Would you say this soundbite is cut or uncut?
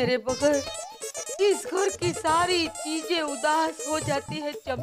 uncut